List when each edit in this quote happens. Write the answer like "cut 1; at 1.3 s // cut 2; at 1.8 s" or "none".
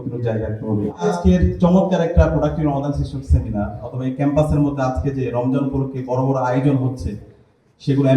cut 1; at 1.1 s